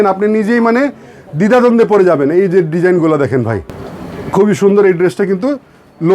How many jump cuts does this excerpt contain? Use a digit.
1